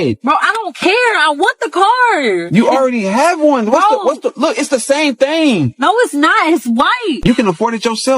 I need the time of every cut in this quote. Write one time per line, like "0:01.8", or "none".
0:07.2

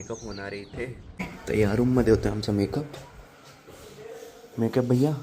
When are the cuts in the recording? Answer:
0:01.1

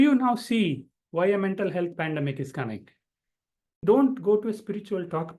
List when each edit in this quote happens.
0:03.8

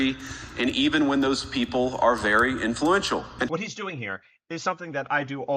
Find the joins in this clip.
0:03.3

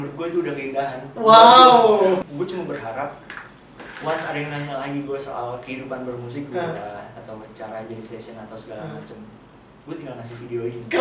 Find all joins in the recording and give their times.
0:02.2

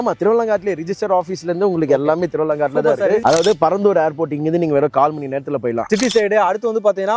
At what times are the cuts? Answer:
0:03.2
0:05.9

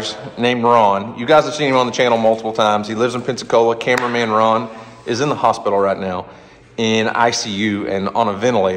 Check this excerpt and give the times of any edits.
none

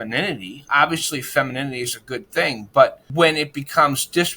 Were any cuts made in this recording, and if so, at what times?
0:03.0

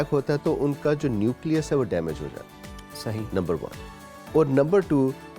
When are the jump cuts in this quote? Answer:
none

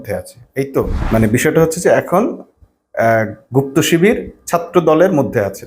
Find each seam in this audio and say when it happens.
0:01.0

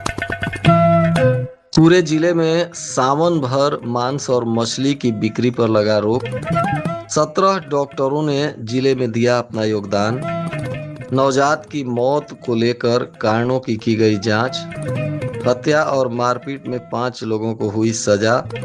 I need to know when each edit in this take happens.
0:01.5

